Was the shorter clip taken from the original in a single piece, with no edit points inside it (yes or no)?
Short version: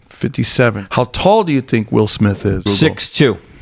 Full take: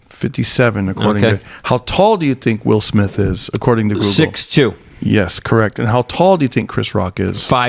no